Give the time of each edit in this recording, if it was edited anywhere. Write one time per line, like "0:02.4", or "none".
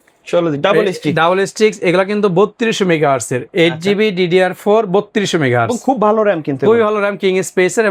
none